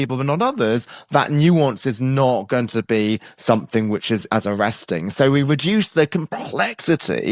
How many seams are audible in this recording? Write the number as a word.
one